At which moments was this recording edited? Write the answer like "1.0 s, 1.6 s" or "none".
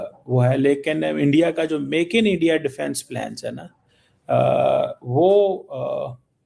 none